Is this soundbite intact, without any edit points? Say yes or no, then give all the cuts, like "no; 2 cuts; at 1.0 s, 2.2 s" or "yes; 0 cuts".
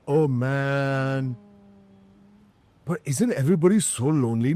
yes; 0 cuts